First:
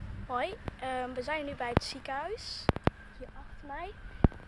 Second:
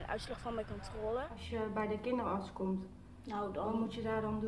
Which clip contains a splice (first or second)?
second